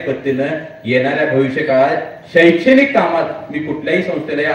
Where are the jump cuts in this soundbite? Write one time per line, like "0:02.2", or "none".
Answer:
none